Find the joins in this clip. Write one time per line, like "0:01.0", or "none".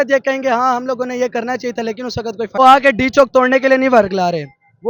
0:02.6